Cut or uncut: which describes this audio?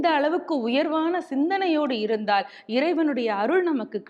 uncut